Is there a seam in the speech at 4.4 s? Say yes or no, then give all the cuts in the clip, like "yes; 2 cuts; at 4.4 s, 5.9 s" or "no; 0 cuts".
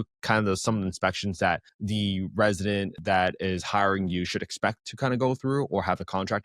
no; 1 cut; at 2.9 s